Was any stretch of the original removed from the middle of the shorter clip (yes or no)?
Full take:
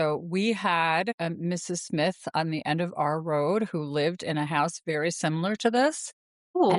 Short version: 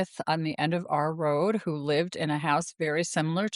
no